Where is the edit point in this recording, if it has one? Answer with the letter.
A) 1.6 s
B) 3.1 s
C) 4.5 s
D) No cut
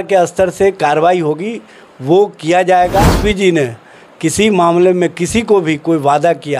B